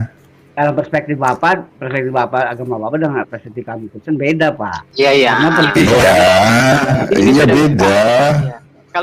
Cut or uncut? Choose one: uncut